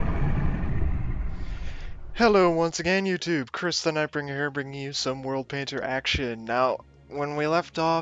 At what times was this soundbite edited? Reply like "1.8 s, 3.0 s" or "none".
none

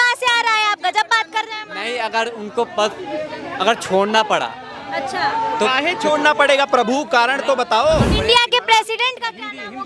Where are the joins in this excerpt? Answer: 8.2 s

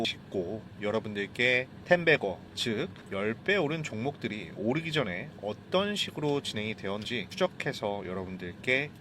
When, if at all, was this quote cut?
7.2 s

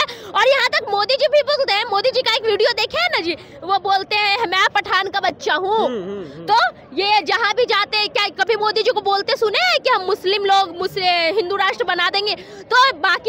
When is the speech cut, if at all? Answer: none

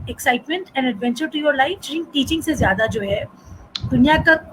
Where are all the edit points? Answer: 1.9 s

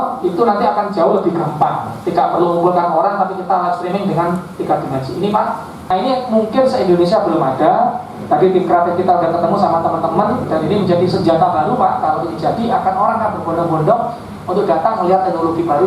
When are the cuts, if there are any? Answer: 5.9 s

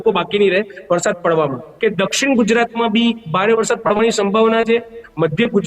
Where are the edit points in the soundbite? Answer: 1.7 s

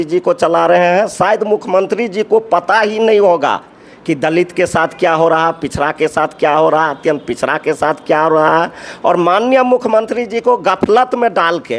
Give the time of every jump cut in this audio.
none

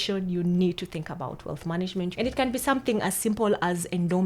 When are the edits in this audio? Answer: 2.1 s

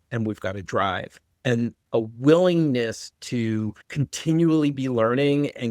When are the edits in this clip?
1.8 s, 3.8 s

